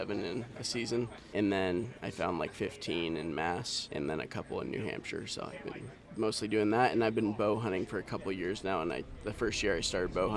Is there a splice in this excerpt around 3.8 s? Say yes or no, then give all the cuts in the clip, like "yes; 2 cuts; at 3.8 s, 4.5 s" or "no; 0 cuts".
yes; 2 cuts; at 1.2 s, 3.8 s